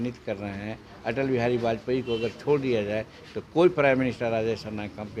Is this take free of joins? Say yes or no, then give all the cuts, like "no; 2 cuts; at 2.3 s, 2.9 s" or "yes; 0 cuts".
yes; 0 cuts